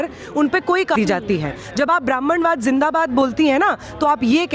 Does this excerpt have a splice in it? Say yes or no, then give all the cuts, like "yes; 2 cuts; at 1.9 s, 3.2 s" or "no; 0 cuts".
yes; 1 cut; at 1.0 s